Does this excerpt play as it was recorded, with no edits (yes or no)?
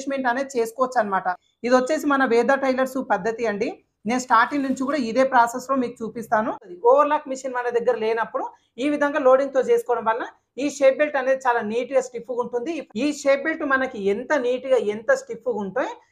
no